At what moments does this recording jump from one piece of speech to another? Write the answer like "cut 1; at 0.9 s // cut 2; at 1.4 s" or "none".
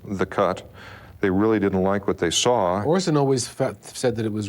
cut 1; at 2.8 s